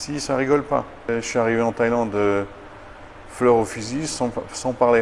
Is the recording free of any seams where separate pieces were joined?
no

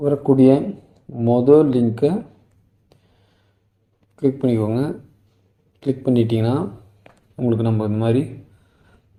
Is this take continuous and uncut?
yes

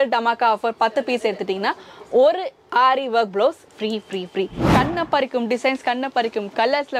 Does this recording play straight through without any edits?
no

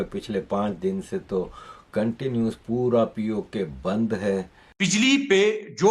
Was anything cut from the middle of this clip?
yes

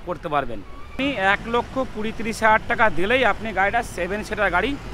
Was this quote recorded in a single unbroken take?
no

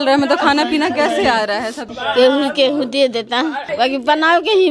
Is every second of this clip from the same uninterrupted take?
no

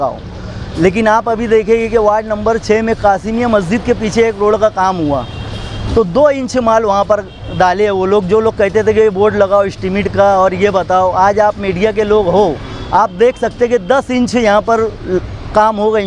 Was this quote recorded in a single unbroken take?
yes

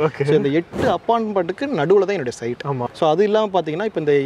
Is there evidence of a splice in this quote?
yes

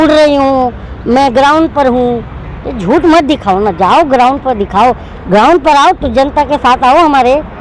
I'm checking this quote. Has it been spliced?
no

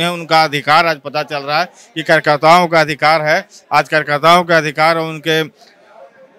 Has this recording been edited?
no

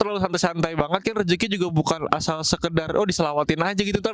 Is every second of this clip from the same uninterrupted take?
yes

